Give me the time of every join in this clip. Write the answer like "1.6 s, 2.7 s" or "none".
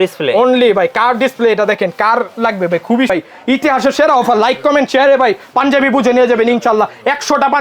3.1 s